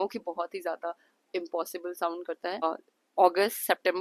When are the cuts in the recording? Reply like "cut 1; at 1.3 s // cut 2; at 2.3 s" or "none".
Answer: cut 1; at 2.6 s